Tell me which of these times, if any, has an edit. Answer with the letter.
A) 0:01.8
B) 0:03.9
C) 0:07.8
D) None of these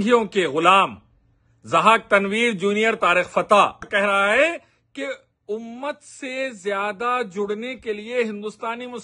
B